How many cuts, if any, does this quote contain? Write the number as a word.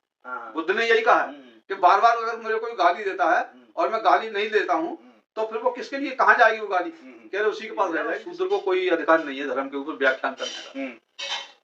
one